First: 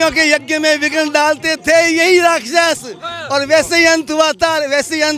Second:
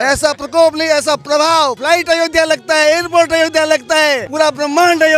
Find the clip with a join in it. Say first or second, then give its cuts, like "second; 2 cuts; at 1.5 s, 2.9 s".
second; 2 cuts; at 1.8 s, 4.3 s